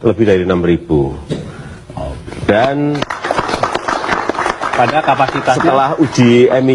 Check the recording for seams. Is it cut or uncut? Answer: uncut